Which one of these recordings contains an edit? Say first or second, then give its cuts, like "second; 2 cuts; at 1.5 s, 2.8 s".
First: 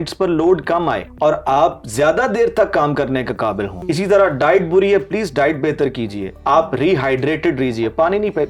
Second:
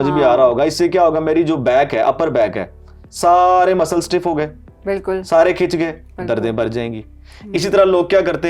first; 3 cuts; at 1.1 s, 3.8 s, 6.3 s